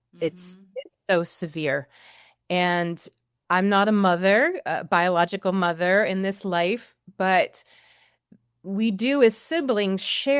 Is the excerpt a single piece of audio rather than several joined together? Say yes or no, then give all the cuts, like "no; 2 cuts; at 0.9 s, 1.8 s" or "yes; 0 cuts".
yes; 0 cuts